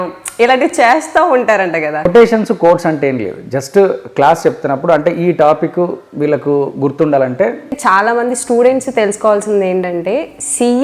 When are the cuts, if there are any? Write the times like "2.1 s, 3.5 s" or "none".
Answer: 2.1 s, 7.8 s